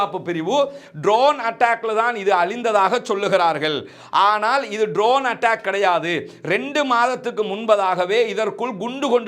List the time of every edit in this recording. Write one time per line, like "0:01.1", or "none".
none